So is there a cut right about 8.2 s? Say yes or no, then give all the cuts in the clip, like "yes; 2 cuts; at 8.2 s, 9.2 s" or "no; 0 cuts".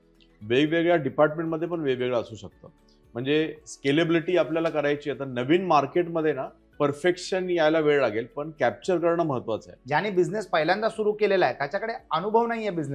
no; 2 cuts; at 6.6 s, 9.7 s